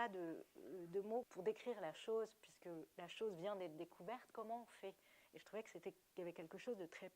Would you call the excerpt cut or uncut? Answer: cut